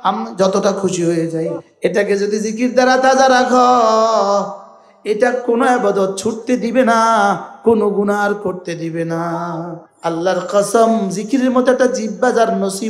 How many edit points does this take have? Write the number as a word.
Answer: two